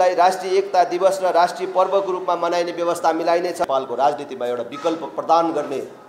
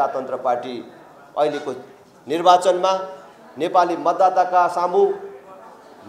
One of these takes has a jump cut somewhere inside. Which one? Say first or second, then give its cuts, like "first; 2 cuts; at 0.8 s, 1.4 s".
first; 1 cut; at 3.6 s